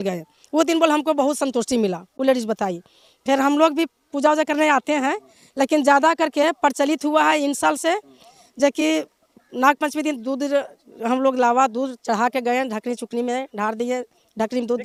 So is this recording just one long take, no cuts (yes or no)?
yes